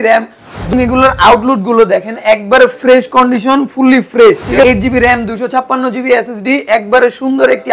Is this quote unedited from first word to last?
no; 2 cuts; at 0.7 s, 4.6 s

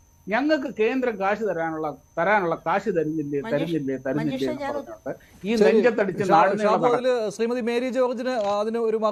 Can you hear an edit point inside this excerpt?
no; 0 cuts

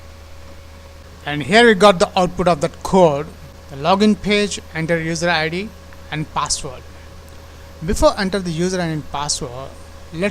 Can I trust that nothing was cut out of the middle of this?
no; 1 cut; at 1.0 s

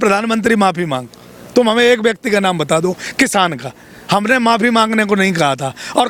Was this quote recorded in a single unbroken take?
yes; 0 cuts

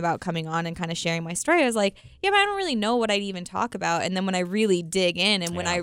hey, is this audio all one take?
yes; 0 cuts

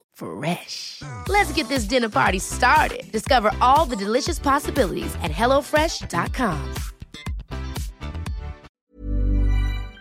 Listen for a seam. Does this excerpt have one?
yes; 1 cut; at 8.7 s

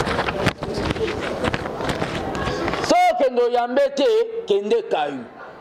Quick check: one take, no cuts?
yes; 0 cuts

